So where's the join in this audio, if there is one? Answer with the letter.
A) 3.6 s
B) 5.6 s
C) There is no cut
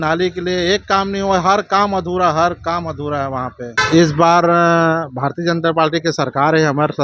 A